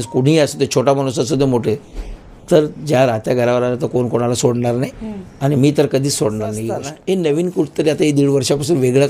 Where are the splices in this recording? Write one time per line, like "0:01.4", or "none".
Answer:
0:06.9